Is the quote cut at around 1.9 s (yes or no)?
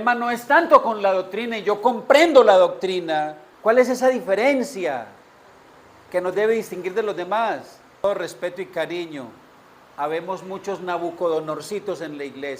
no